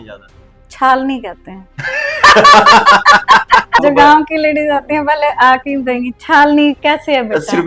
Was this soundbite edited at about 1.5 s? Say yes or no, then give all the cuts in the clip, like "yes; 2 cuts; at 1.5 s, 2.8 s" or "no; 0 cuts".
no; 1 cut; at 3.8 s